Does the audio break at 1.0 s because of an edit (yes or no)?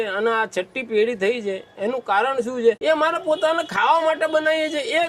no